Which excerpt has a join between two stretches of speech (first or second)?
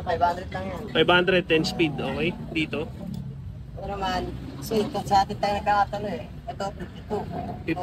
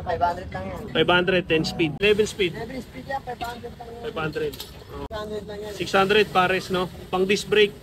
second